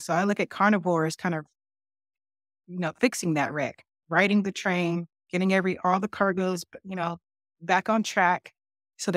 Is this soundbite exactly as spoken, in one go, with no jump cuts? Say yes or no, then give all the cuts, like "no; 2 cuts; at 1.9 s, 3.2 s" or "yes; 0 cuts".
yes; 0 cuts